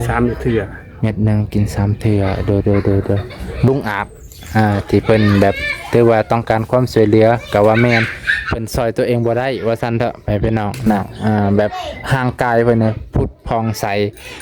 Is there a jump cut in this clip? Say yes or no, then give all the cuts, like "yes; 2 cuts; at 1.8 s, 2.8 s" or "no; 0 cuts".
yes; 2 cuts; at 3.7 s, 10.9 s